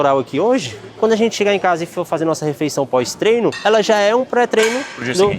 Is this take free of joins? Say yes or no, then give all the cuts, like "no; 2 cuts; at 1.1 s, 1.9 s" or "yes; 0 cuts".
yes; 0 cuts